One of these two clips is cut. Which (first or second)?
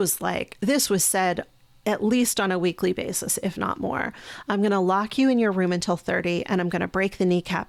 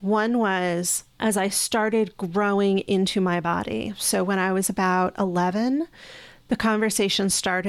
second